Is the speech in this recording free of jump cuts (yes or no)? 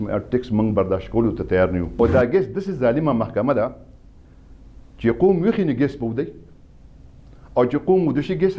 no